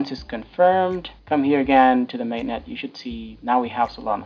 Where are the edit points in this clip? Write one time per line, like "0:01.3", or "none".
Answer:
0:01.1
0:03.3